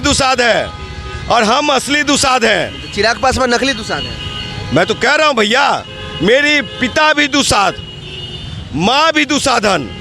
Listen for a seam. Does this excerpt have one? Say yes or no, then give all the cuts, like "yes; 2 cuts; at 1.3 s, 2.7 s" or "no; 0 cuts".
no; 0 cuts